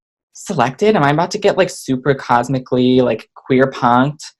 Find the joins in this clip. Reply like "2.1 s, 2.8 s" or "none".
none

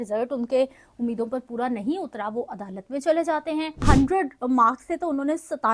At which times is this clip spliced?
3.8 s

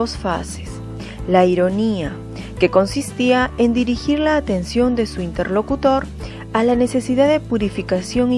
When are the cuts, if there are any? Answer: 5.3 s

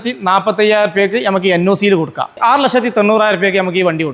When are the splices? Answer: 2.3 s

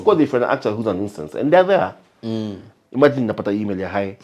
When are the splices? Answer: 2.6 s

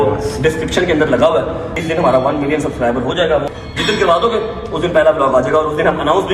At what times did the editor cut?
1.7 s, 3.5 s

